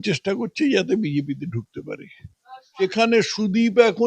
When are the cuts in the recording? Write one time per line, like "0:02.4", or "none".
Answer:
0:02.8